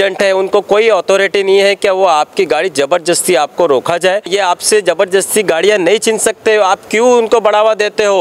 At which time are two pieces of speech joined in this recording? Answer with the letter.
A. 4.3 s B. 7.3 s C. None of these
A